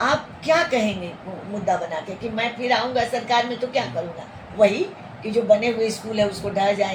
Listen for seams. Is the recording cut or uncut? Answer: uncut